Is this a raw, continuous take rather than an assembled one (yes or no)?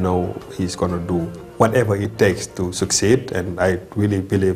no